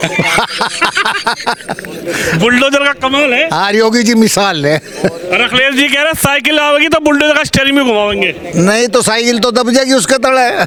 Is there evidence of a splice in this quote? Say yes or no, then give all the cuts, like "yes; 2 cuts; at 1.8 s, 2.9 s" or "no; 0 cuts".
no; 0 cuts